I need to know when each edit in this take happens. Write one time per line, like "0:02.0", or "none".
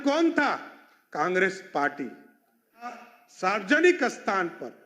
0:02.9